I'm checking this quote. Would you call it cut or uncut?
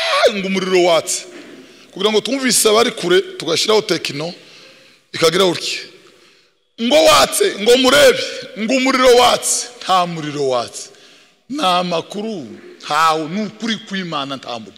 uncut